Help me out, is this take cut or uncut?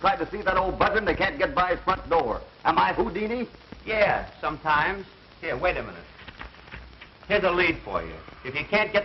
uncut